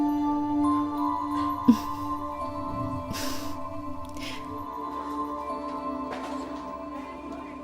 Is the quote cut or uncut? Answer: cut